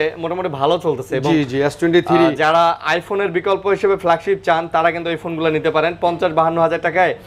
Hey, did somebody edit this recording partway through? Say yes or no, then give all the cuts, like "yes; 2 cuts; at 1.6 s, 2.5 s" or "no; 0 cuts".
no; 0 cuts